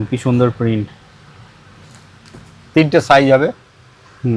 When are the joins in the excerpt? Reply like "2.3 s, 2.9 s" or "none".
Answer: 2.5 s